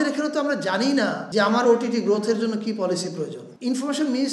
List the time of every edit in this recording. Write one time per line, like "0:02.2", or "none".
0:01.2
0:03.5